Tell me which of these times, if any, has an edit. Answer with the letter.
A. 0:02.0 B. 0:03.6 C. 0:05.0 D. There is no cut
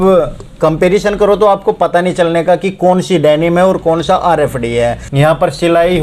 C